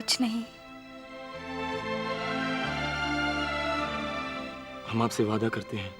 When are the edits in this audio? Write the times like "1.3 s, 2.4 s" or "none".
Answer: 2.4 s, 4.2 s